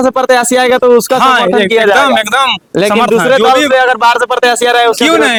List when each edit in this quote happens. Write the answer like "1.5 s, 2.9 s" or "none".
none